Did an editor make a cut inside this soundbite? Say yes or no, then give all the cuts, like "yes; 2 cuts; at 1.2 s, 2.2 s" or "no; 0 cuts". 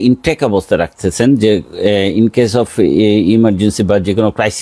no; 0 cuts